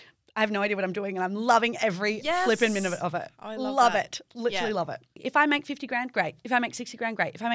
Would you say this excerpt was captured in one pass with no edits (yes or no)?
no